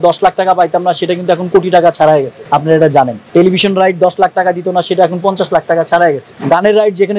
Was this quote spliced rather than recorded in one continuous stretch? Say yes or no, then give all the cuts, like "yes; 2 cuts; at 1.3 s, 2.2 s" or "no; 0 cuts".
yes; 2 cuts; at 2.9 s, 6.3 s